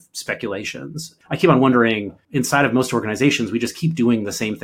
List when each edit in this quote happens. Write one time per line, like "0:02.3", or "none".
0:01.1
0:02.2